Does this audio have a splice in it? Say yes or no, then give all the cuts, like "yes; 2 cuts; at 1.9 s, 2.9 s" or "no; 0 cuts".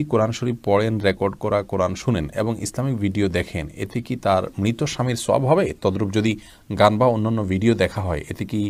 no; 0 cuts